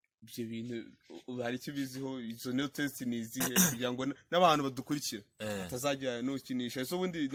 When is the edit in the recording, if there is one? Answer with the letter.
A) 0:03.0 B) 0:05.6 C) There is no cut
C